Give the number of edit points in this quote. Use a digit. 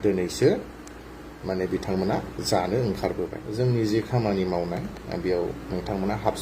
1